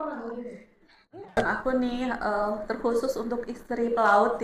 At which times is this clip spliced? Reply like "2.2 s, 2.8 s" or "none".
1.4 s